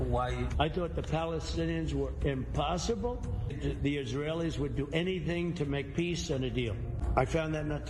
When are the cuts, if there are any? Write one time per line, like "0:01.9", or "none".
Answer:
0:03.6
0:07.0